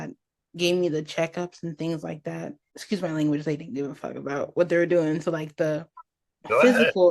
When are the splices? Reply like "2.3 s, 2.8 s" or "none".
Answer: 2.8 s